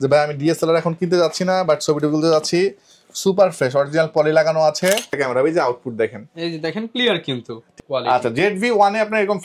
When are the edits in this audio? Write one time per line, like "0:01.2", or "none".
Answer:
0:05.1
0:07.7